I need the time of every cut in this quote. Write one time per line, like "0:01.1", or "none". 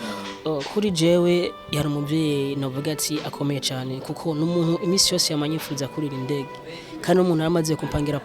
none